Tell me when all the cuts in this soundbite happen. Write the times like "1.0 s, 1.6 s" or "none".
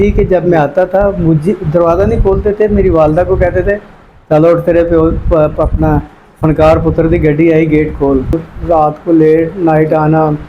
8.3 s